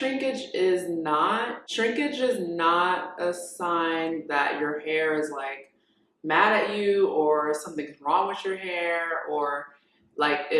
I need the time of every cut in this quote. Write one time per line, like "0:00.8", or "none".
0:01.5